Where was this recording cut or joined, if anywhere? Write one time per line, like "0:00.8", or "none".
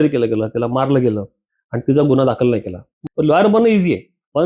0:03.0